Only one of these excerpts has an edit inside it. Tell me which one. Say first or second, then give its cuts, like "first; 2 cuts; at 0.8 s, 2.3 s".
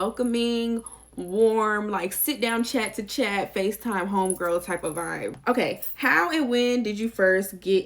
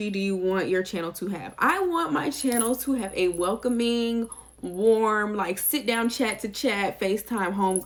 first; 1 cut; at 5.4 s